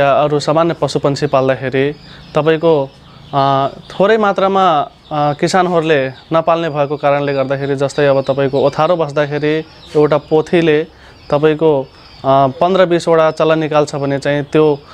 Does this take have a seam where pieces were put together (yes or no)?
no